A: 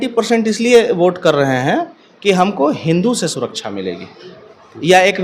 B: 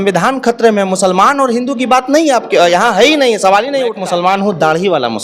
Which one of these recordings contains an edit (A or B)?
B